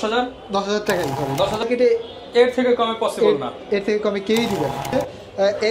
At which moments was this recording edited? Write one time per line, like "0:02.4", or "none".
0:01.6
0:04.9